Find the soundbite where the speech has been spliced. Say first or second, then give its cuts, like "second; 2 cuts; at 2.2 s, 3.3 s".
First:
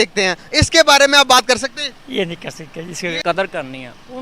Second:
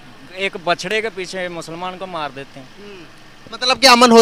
first; 1 cut; at 3.2 s